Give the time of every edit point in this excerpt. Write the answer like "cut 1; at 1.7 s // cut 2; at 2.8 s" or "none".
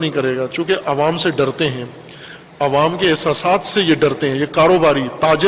none